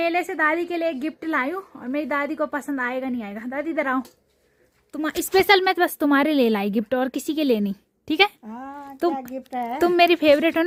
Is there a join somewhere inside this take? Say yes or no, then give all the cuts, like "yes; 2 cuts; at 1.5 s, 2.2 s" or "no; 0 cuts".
no; 0 cuts